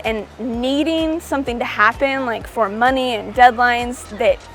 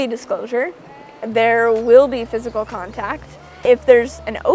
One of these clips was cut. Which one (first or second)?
second